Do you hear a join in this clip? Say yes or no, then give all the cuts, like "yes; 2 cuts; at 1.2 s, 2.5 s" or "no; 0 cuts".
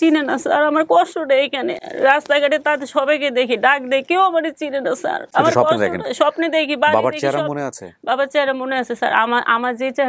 no; 0 cuts